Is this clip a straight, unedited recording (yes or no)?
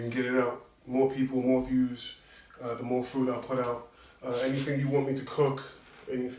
yes